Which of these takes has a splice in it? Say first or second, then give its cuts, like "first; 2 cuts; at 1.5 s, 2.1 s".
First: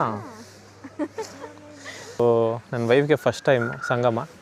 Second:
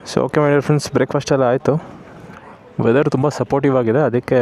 first; 1 cut; at 2.2 s